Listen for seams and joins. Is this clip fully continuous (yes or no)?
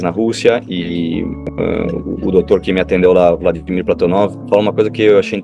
no